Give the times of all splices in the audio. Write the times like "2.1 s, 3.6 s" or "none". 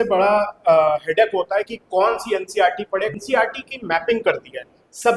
3.1 s